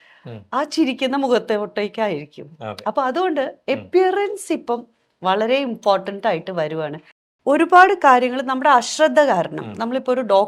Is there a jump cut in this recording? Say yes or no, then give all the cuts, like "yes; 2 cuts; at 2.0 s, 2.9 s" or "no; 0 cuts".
yes; 1 cut; at 7.3 s